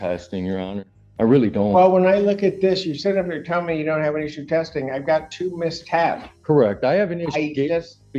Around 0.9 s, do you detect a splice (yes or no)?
no